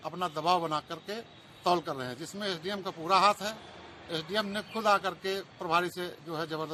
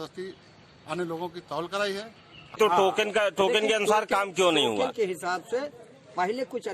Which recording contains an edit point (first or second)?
second